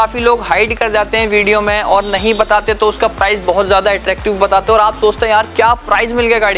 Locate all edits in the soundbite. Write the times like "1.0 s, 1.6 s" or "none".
none